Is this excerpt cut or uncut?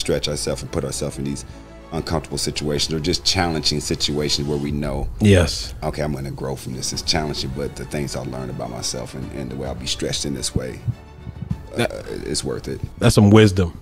cut